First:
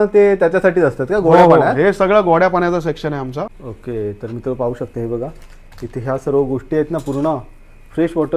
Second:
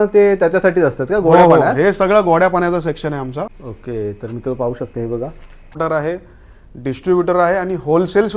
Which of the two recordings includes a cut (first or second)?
second